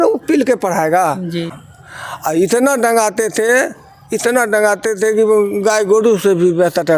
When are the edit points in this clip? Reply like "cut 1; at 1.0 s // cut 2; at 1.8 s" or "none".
cut 1; at 1.5 s